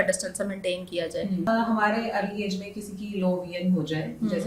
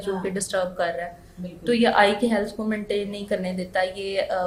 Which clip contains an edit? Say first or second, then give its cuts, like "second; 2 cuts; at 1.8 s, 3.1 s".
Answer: first; 1 cut; at 1.5 s